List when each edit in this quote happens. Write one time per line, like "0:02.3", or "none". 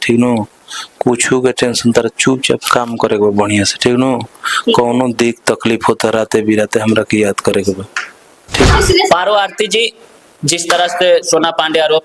0:08.7

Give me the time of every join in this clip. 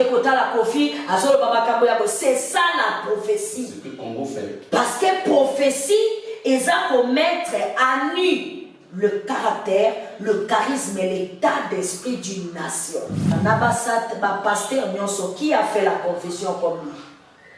0:13.3

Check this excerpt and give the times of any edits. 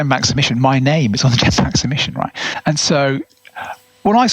0:02.5

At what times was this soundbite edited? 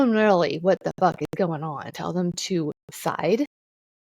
0:01.9
0:02.9

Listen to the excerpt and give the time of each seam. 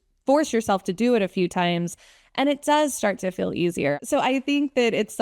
0:04.0

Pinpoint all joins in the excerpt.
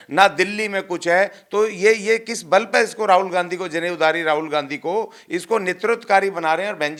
none

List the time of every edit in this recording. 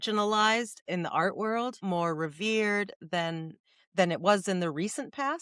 0:01.8

